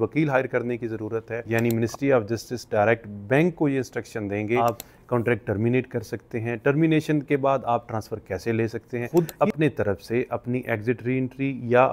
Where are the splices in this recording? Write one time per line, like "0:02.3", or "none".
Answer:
0:01.4
0:04.6
0:09.0